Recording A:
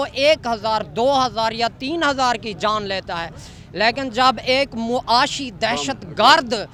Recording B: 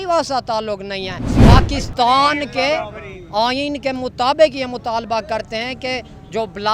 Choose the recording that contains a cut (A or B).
B